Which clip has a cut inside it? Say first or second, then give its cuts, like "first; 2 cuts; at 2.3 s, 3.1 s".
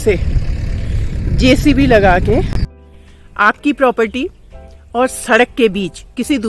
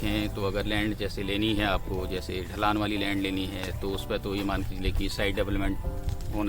first; 1 cut; at 2.6 s